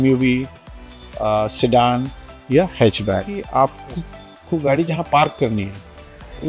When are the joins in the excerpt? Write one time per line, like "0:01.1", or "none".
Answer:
0:03.4